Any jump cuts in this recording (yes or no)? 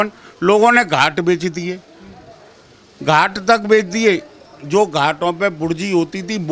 no